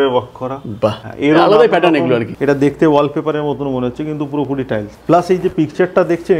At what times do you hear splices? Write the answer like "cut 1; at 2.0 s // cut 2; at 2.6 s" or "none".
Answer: cut 1; at 1.1 s // cut 2; at 2.3 s // cut 3; at 4.9 s